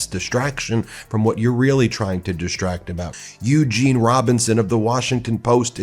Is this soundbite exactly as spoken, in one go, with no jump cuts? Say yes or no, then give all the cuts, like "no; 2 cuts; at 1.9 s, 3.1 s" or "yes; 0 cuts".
no; 1 cut; at 3.2 s